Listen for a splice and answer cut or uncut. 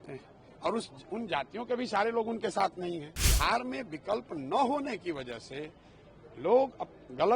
cut